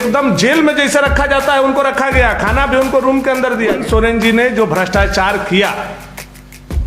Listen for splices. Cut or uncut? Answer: cut